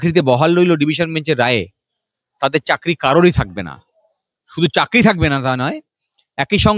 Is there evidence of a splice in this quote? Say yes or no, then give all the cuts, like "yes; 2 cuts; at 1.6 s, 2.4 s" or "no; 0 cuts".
no; 0 cuts